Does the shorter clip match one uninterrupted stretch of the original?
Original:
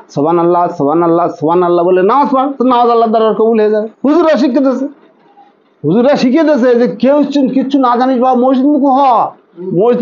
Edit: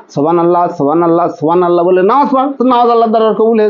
yes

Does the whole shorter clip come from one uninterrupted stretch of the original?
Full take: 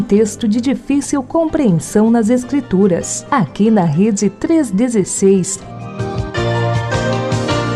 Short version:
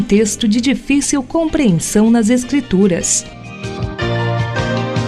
no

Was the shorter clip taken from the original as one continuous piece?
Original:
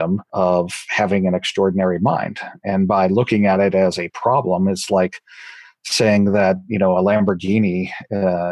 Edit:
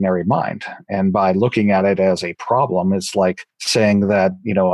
no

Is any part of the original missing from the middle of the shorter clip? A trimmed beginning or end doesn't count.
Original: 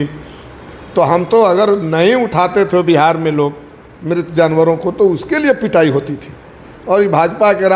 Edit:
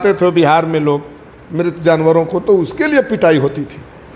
no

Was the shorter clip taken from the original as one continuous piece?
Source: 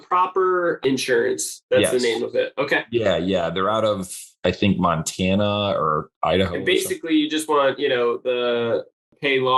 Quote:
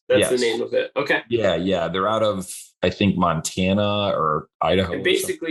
yes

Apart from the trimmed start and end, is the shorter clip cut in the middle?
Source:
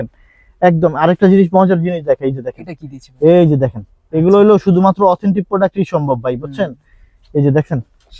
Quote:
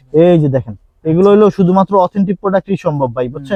no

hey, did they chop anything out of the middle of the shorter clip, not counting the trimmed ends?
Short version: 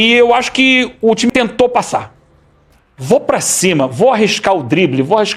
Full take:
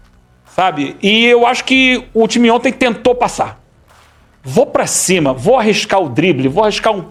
yes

